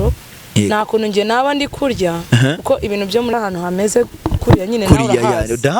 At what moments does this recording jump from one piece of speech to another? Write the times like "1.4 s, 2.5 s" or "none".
3.3 s